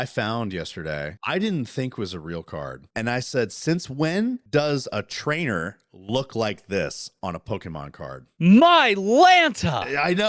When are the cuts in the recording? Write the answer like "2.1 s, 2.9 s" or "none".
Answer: 1.1 s, 2.8 s, 4.4 s, 8.2 s